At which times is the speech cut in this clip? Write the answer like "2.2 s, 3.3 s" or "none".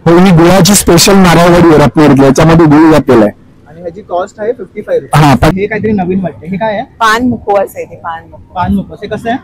5.5 s